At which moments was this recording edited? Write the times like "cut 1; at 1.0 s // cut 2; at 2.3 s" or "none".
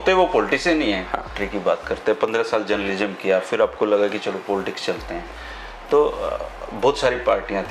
cut 1; at 1.4 s